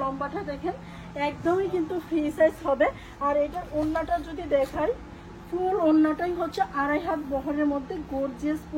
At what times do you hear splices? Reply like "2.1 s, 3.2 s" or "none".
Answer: none